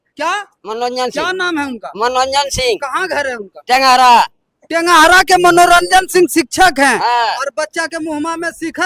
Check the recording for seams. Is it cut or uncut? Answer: uncut